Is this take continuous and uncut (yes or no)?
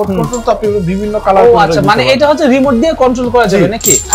yes